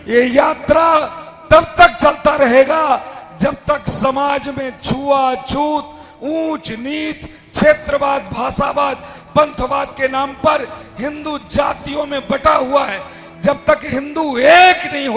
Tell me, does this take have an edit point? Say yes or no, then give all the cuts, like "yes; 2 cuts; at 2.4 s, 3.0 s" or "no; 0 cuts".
no; 0 cuts